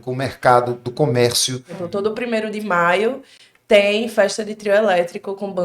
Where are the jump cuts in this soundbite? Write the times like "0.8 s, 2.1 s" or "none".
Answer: 1.8 s